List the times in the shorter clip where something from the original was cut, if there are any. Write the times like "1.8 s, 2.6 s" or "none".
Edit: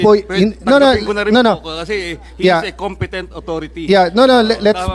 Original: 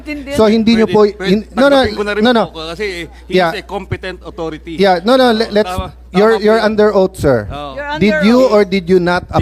none